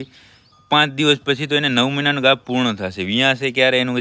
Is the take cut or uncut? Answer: uncut